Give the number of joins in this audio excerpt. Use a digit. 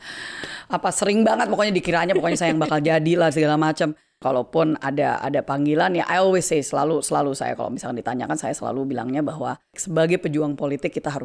2